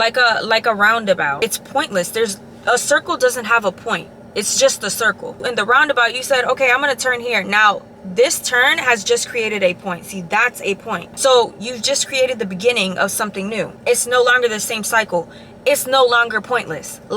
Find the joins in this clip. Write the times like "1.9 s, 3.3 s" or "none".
1.4 s, 5.3 s, 11.1 s